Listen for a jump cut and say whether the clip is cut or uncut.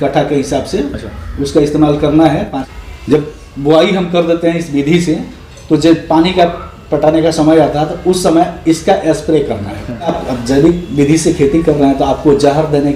cut